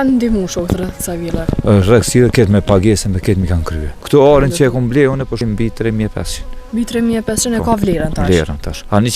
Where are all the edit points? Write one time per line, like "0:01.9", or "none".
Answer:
0:03.9
0:05.4